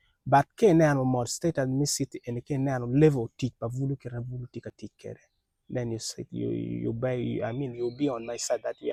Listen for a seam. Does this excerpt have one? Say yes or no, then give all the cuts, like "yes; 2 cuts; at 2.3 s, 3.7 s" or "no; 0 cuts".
no; 0 cuts